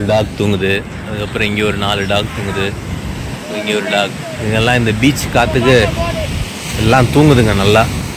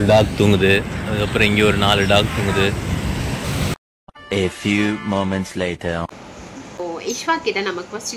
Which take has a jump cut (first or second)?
second